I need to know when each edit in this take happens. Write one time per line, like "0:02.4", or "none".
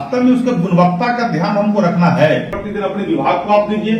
0:02.6